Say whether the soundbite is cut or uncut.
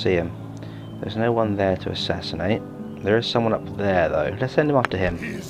uncut